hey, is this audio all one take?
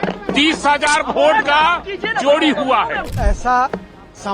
no; 1 cut; at 3.0 s

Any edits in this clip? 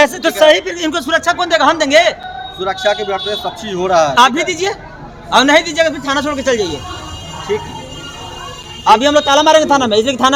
no; 0 cuts

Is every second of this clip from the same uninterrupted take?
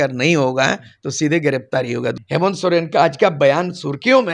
no; 1 cut; at 2.1 s

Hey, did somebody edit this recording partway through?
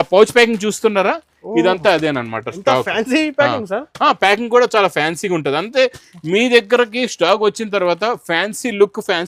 no; 0 cuts

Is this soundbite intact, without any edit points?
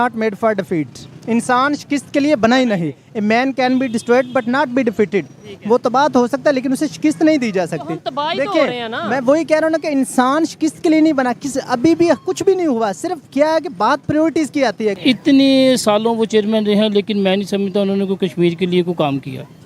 no; 1 cut; at 15.0 s

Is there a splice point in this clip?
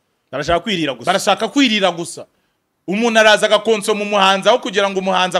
no; 0 cuts

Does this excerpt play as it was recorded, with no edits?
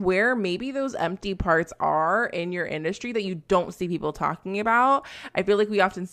yes; 0 cuts

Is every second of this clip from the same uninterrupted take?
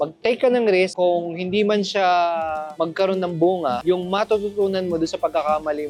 yes; 0 cuts

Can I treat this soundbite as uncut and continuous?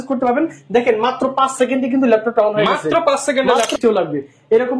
no; 1 cut; at 3.7 s

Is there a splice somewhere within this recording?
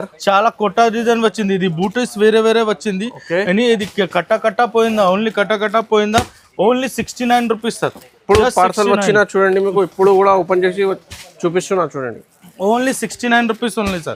no; 0 cuts

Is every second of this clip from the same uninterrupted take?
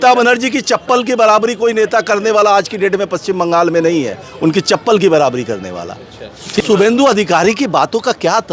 no; 1 cut; at 6.6 s

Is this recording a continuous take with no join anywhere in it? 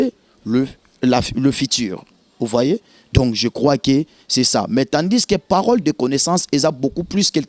yes; 0 cuts

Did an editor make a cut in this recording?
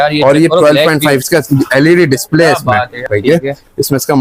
yes; 1 cut; at 3.1 s

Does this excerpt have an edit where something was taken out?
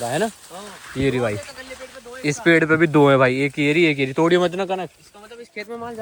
no; 0 cuts

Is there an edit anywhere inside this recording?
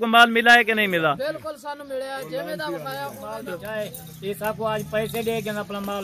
yes; 1 cut; at 3.3 s

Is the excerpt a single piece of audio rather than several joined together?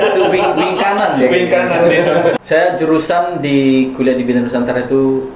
no; 1 cut; at 2.4 s

